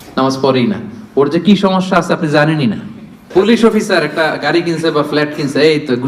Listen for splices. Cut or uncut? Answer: cut